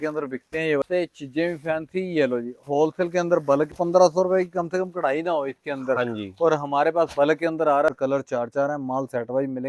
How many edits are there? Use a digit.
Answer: 3